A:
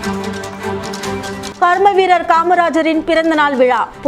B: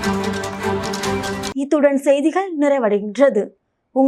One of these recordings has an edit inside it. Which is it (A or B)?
A